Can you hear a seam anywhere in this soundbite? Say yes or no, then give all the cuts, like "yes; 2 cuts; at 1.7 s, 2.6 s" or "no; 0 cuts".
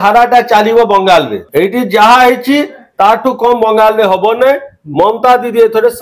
yes; 1 cut; at 1.4 s